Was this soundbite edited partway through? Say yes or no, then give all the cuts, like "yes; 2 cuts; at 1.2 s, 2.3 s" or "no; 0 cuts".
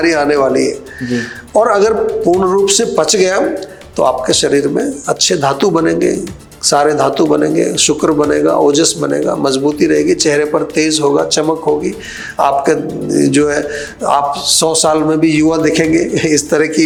no; 0 cuts